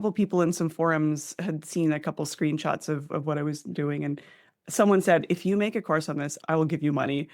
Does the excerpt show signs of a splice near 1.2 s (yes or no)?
no